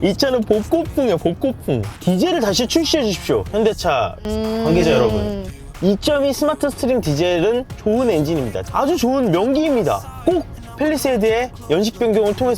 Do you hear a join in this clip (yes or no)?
yes